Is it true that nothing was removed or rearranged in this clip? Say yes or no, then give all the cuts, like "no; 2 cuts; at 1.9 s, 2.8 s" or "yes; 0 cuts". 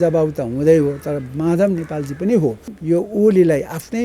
no; 1 cut; at 2.7 s